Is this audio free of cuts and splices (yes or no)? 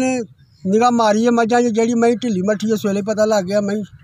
yes